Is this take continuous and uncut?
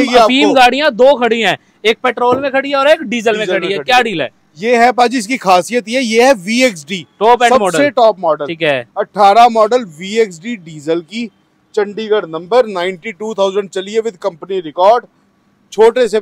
yes; 0 cuts

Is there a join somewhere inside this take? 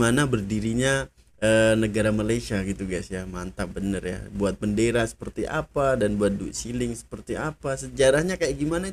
no; 0 cuts

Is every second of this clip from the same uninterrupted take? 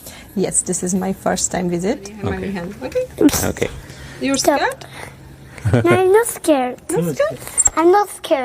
no; 1 cut; at 2.1 s

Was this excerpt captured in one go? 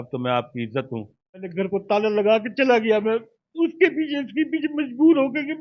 no; 1 cut; at 1.5 s

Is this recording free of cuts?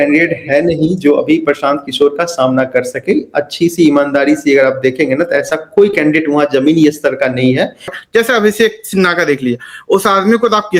no; 1 cut; at 8.0 s

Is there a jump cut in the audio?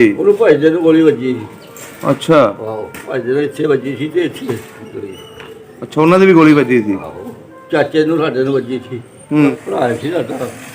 yes; 1 cut; at 9.5 s

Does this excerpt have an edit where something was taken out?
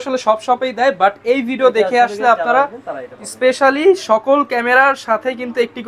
no; 0 cuts

